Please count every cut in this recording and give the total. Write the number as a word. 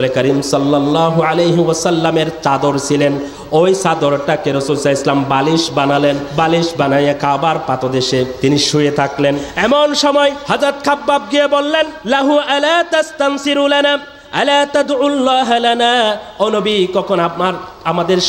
five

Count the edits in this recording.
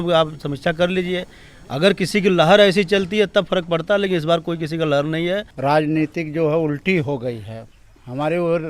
one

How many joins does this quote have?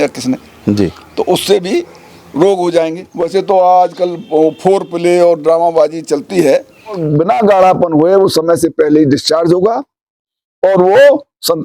two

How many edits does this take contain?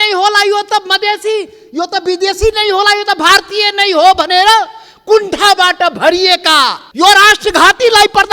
one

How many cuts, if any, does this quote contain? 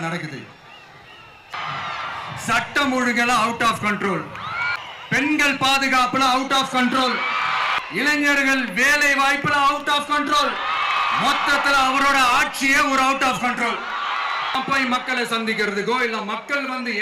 four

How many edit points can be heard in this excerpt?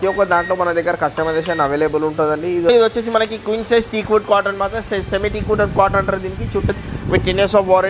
two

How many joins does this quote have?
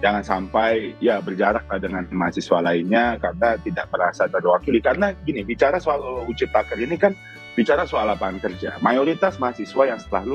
zero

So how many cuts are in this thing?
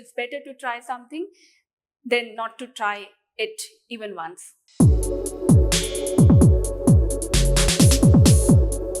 one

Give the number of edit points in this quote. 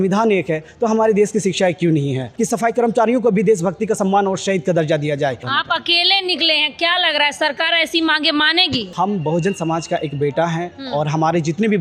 three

